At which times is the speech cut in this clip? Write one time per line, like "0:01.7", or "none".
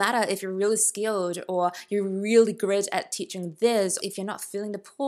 0:04.0